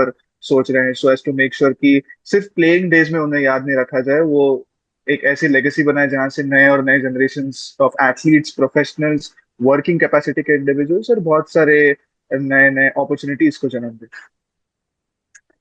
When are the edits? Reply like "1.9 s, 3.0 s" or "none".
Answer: none